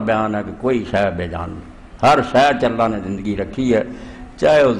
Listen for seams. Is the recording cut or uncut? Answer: uncut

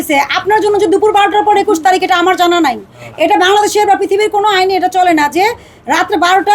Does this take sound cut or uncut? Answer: uncut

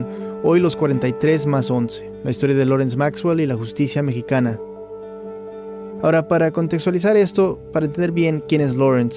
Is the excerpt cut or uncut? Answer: cut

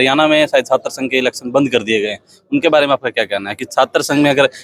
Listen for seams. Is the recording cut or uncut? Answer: uncut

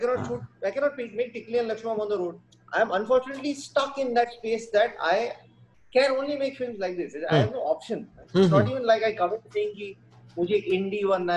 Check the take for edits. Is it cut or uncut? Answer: cut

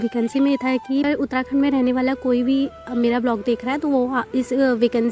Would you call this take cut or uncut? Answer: cut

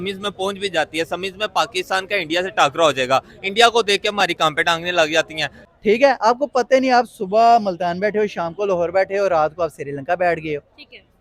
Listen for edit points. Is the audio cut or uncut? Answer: uncut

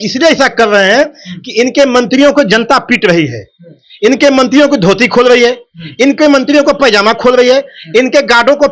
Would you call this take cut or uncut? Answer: uncut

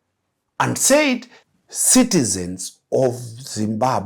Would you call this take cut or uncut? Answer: cut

